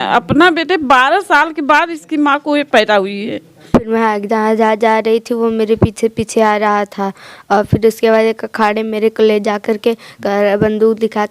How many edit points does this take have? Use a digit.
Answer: 1